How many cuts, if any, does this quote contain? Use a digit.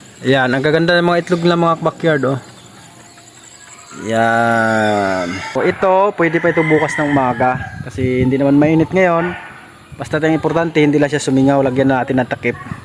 1